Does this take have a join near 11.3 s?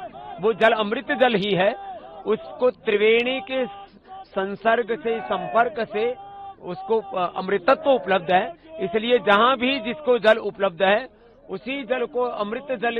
no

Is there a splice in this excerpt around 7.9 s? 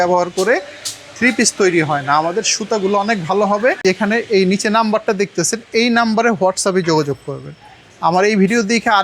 no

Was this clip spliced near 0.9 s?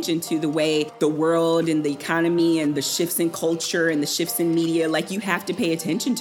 yes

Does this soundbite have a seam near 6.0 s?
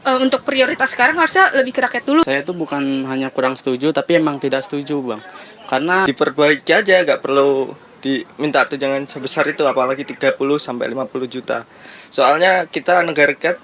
yes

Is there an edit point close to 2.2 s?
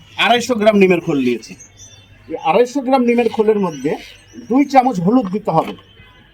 no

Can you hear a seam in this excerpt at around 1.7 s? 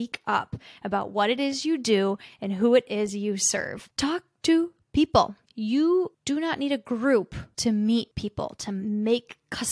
no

